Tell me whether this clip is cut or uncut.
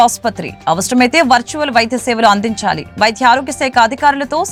uncut